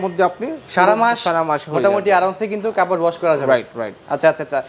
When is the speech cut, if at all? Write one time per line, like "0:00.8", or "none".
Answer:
none